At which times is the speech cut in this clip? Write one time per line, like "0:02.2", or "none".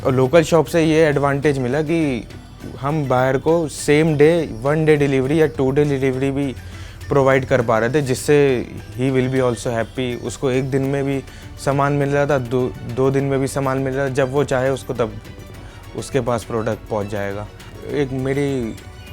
none